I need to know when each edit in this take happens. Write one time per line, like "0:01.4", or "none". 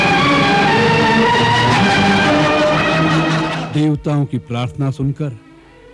0:03.5